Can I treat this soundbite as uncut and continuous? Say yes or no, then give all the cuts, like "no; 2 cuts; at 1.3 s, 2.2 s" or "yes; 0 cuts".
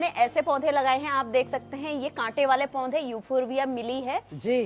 yes; 0 cuts